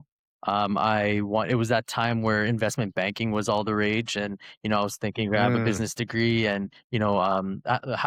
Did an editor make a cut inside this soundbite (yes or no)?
no